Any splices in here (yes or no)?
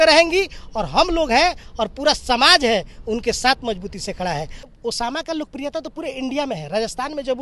yes